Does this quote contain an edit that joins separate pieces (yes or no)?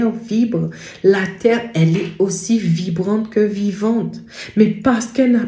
no